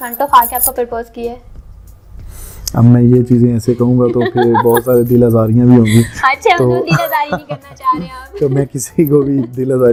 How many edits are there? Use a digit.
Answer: 0